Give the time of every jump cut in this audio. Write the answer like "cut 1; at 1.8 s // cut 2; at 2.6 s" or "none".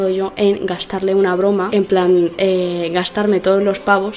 cut 1; at 1.7 s